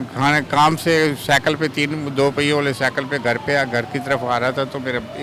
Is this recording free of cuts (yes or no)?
yes